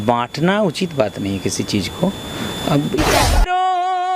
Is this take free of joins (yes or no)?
no